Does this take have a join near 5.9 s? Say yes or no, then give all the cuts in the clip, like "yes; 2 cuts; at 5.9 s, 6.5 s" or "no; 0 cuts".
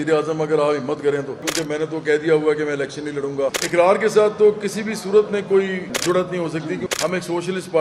yes; 4 cuts; at 1.5 s, 3.6 s, 5.9 s, 6.9 s